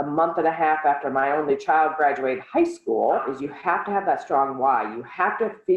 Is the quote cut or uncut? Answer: cut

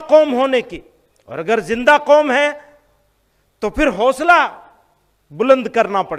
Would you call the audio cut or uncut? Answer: uncut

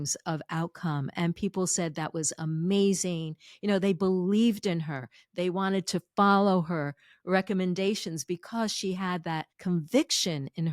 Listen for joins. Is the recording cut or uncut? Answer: cut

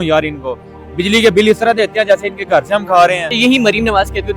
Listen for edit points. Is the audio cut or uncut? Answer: cut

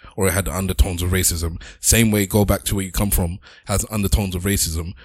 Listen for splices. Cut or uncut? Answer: cut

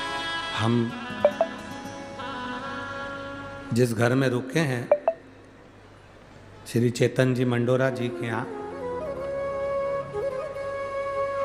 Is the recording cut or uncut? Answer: uncut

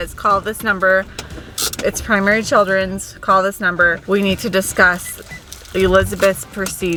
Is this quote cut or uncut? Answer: uncut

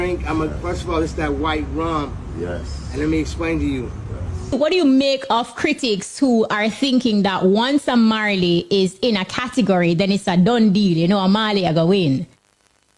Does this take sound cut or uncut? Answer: cut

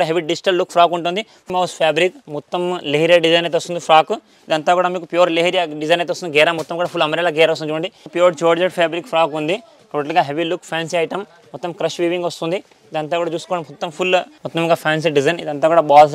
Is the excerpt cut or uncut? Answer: cut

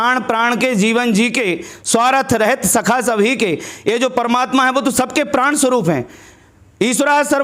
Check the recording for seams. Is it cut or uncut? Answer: uncut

